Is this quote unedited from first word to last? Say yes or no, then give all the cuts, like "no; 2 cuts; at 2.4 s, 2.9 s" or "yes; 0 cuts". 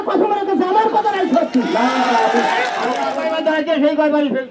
no; 1 cut; at 3.1 s